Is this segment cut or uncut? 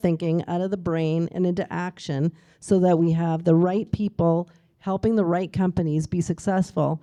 uncut